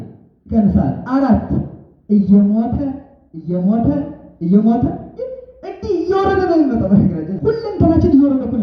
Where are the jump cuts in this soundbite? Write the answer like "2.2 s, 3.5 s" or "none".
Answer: 7.3 s